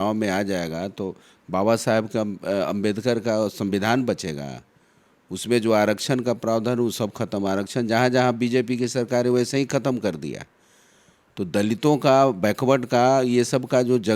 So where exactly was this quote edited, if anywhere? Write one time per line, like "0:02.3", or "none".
none